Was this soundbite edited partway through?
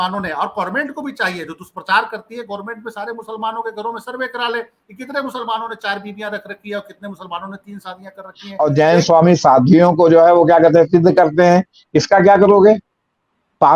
yes; 1 cut; at 8.4 s

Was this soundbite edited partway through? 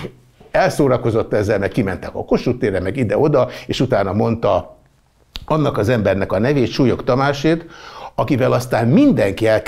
no; 0 cuts

